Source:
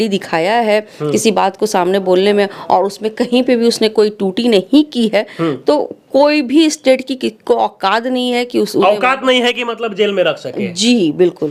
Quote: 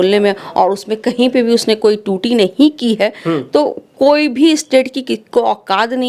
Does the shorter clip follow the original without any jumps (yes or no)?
yes